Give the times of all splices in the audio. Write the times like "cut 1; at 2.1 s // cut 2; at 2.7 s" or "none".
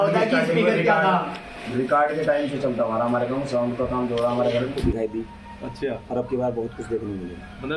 cut 1; at 4.8 s